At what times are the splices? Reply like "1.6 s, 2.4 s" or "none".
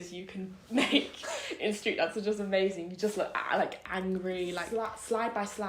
4.6 s